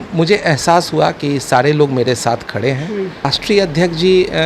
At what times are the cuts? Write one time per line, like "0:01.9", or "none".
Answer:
0:03.3